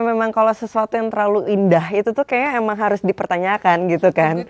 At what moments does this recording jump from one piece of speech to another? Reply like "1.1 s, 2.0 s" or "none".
none